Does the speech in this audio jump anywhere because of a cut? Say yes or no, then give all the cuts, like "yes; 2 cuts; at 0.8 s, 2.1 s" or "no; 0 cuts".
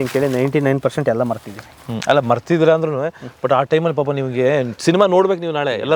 no; 0 cuts